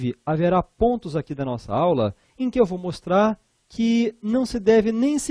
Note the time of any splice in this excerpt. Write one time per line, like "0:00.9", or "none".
0:01.3